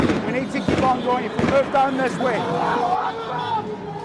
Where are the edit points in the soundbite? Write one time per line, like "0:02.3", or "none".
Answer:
0:02.4